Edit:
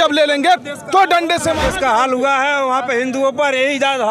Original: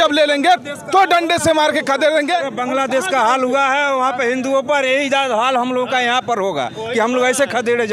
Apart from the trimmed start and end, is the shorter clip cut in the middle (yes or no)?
yes